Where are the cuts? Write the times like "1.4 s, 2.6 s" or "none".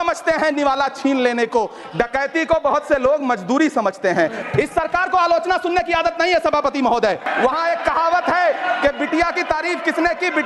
4.4 s, 7.3 s